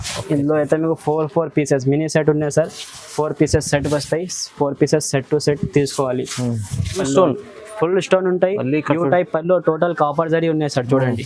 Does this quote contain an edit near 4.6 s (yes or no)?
no